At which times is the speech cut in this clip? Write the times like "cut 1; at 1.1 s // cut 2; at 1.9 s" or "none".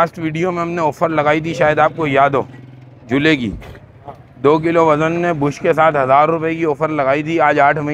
none

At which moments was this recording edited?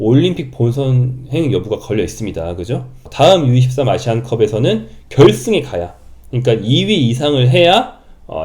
cut 1; at 3.0 s

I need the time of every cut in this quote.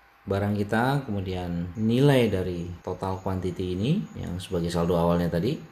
cut 1; at 1.7 s // cut 2; at 2.7 s // cut 3; at 4.2 s

